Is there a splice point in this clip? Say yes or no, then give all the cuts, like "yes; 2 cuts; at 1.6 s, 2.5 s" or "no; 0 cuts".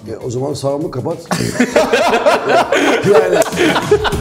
no; 0 cuts